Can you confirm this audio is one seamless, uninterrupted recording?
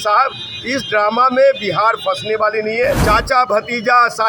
no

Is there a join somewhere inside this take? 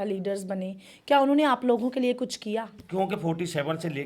yes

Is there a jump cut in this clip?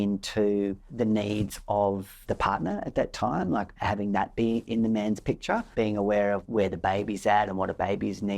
yes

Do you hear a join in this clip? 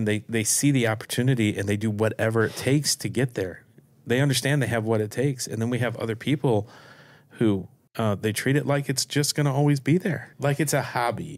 yes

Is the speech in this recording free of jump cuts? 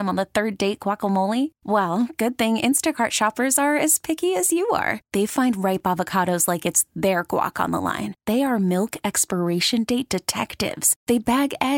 yes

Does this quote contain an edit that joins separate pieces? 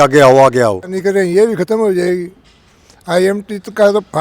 yes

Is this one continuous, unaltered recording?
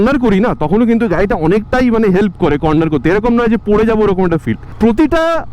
no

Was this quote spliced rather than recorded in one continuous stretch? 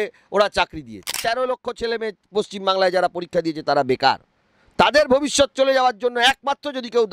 yes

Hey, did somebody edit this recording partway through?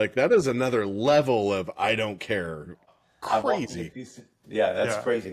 no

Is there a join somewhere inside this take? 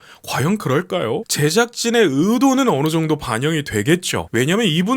yes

